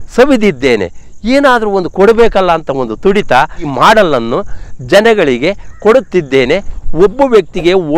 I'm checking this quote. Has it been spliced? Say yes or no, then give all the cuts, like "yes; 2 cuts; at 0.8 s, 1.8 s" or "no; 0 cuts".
yes; 2 cuts; at 3.6 s, 6.7 s